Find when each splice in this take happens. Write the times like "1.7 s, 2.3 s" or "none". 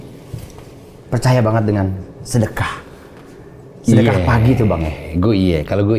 none